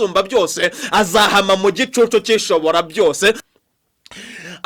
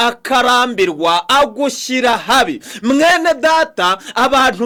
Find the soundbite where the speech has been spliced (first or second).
first